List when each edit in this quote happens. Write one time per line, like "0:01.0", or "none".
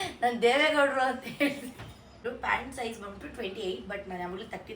0:02.2